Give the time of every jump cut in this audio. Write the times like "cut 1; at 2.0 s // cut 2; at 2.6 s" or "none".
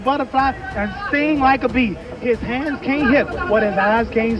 none